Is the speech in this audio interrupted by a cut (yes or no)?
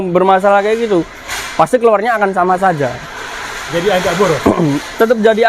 no